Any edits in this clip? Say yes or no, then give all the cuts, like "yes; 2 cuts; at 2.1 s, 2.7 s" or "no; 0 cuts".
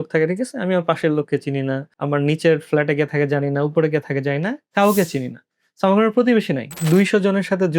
yes; 2 cuts; at 1.9 s, 6.7 s